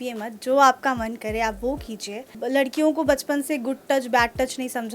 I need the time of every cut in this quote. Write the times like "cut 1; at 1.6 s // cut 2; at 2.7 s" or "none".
cut 1; at 2.3 s